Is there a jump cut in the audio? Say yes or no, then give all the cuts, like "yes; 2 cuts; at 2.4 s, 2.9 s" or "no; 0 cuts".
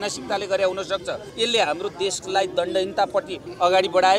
no; 0 cuts